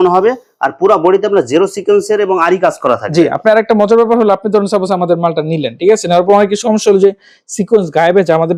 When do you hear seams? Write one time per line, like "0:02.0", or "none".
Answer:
none